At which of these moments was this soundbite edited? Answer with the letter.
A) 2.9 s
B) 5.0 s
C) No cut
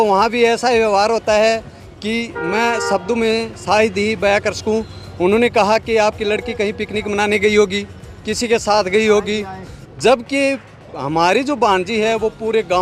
C